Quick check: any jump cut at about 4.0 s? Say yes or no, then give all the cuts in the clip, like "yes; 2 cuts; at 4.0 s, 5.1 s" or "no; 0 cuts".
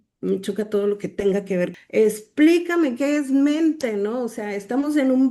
no; 1 cut; at 1.7 s